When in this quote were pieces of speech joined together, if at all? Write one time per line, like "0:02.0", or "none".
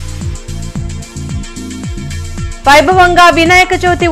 none